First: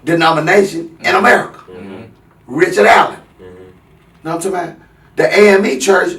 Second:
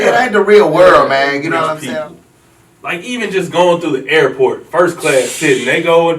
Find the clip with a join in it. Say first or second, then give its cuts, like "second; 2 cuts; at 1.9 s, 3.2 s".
second; 1 cut; at 1.8 s